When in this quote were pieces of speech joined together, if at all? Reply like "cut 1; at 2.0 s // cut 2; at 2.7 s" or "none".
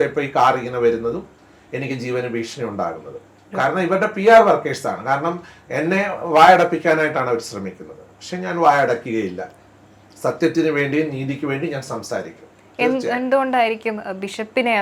none